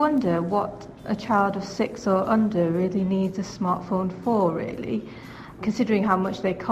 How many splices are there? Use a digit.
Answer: 2